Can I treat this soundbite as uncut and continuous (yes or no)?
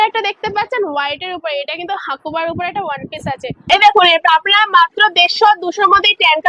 no